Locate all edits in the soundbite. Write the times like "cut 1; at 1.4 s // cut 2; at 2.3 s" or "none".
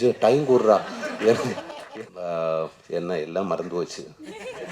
cut 1; at 2.0 s